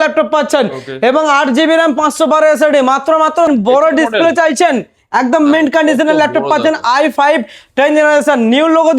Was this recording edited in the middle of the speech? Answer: yes; 1 cut; at 3.5 s

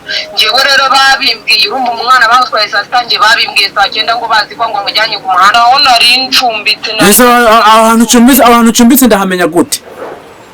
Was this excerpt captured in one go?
no; 1 cut; at 5.5 s

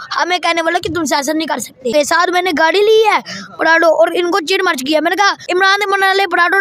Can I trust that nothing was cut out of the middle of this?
no; 2 cuts; at 1.9 s, 5.4 s

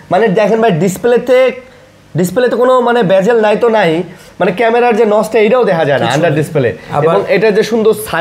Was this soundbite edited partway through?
no; 0 cuts

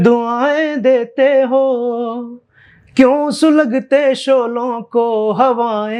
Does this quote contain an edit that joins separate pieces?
no; 0 cuts

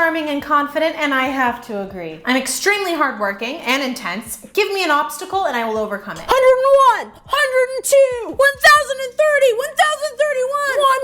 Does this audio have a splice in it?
no; 0 cuts

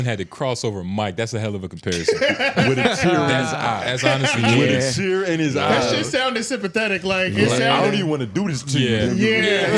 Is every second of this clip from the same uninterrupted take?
yes; 0 cuts

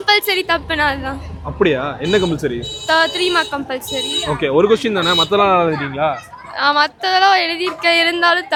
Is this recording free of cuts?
yes; 0 cuts

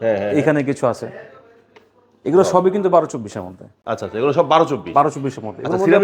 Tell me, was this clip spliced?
no; 0 cuts

